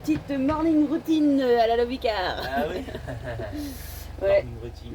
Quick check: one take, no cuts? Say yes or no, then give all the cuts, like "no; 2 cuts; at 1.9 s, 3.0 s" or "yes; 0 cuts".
yes; 0 cuts